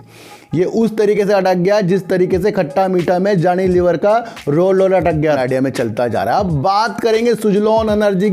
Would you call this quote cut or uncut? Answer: cut